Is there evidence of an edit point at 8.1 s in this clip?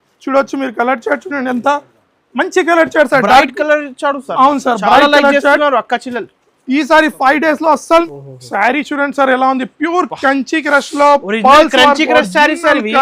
yes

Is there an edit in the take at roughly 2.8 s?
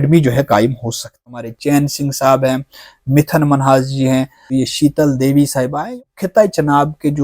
no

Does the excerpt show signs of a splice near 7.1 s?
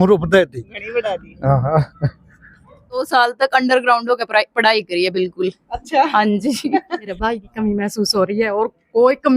yes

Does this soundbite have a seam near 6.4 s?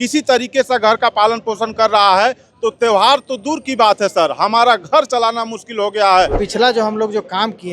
yes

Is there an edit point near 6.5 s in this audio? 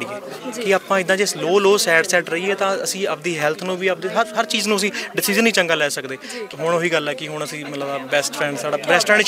yes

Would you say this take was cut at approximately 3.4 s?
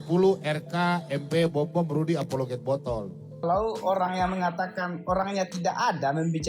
yes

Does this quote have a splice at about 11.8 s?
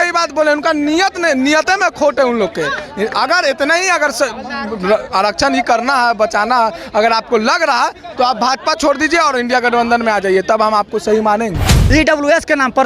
yes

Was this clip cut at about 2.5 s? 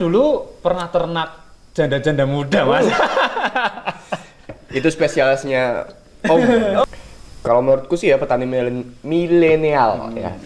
no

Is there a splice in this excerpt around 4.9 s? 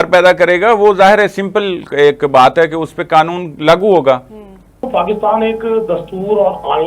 yes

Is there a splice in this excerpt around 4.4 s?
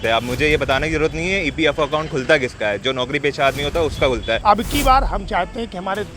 yes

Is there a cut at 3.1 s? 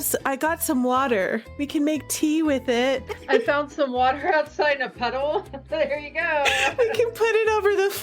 yes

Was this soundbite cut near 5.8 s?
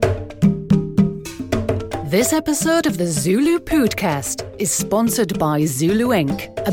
no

